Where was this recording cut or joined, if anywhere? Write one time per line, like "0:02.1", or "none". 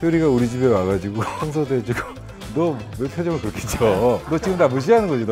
0:01.3